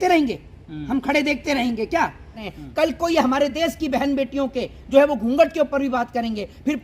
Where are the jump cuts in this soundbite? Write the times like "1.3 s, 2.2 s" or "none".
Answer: 2.3 s